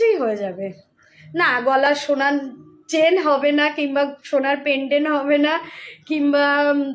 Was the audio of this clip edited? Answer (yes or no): no